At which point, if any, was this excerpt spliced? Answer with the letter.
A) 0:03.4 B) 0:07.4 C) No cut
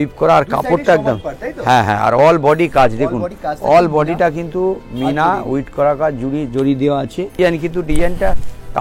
B